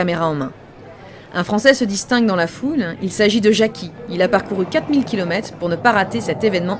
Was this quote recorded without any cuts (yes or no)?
no